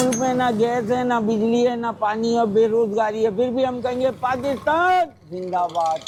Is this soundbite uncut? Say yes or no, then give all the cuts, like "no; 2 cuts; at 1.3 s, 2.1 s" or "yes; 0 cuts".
yes; 0 cuts